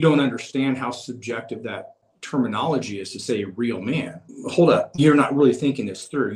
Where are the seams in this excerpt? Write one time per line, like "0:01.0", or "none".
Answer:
0:02.0
0:04.2